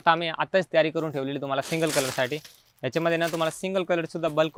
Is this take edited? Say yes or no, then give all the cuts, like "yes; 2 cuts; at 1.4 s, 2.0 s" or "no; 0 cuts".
no; 0 cuts